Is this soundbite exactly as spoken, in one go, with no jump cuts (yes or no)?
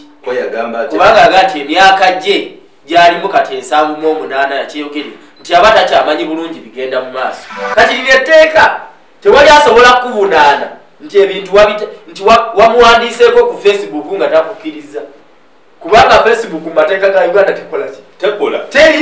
no